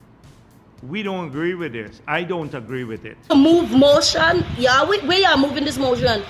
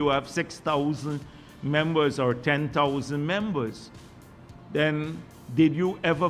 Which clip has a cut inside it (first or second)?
first